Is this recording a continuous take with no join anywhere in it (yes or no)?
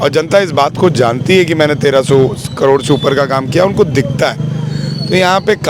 yes